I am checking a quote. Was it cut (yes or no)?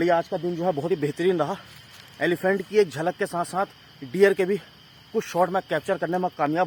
no